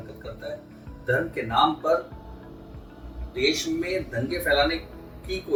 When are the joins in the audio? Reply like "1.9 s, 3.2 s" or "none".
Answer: none